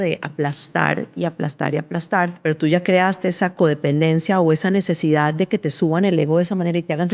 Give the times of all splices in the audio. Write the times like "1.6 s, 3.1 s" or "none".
2.4 s